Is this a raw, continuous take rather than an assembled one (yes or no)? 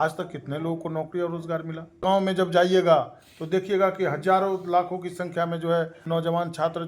no